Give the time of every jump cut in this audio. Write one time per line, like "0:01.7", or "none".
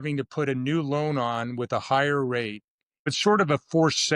0:03.1